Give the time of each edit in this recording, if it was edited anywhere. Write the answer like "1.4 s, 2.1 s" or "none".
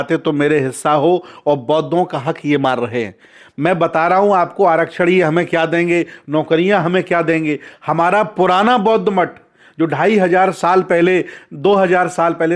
none